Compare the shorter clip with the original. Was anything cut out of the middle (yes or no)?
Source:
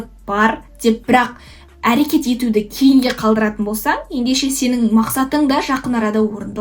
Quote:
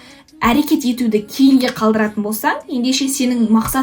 no